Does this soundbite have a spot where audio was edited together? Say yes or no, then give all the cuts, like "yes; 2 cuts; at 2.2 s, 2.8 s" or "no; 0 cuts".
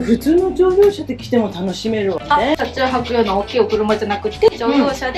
no; 0 cuts